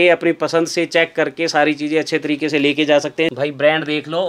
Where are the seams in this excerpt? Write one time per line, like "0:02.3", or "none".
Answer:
0:03.3